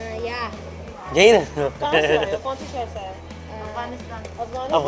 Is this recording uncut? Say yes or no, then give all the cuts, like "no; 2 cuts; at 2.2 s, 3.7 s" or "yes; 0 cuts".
yes; 0 cuts